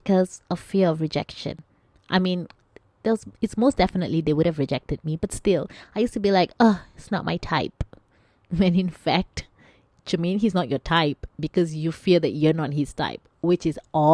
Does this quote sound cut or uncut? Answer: uncut